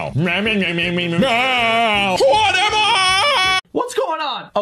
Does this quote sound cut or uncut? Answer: cut